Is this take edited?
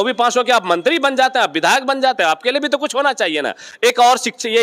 no; 0 cuts

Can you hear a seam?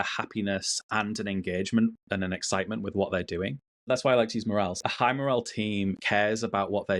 yes; 3 cuts; at 3.8 s, 4.8 s, 6.0 s

